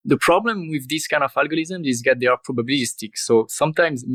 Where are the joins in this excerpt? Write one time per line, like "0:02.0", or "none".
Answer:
none